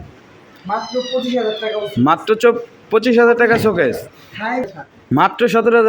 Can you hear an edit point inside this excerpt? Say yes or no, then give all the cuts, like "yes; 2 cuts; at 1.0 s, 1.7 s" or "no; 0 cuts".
yes; 1 cut; at 4.6 s